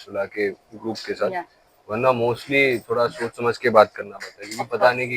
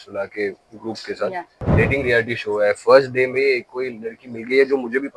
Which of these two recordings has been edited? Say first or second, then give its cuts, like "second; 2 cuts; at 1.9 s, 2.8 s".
second; 1 cut; at 1.6 s